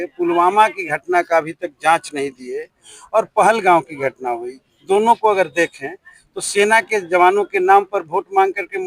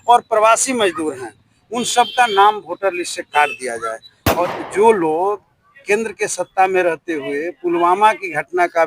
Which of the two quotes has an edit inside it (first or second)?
second